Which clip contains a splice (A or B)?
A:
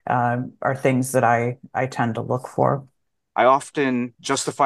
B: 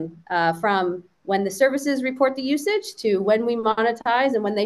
A